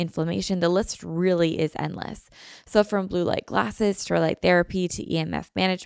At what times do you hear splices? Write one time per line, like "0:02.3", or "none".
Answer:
none